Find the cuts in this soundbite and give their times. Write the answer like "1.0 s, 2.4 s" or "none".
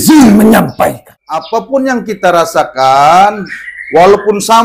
1.7 s